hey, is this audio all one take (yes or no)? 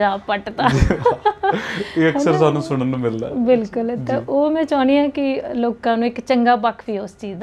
yes